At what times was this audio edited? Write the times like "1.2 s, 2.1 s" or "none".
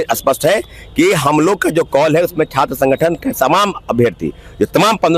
none